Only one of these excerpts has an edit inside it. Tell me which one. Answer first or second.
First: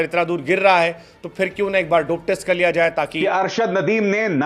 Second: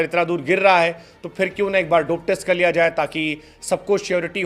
first